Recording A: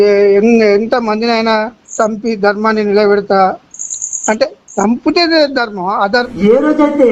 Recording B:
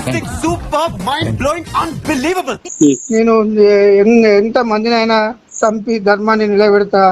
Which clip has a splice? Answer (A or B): B